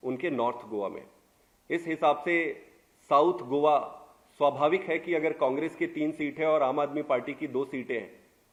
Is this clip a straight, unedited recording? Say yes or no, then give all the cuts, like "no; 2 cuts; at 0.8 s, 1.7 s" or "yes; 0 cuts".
yes; 0 cuts